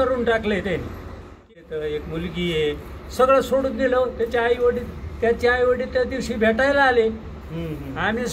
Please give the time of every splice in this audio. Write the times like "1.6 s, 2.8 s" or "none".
1.5 s